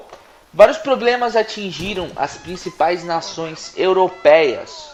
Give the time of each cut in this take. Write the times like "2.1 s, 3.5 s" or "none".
none

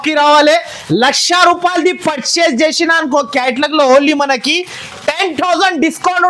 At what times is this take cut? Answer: none

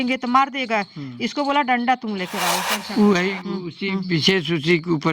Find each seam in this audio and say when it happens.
2.6 s

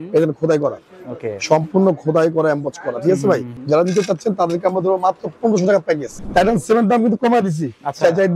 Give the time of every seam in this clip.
3.5 s, 6.1 s

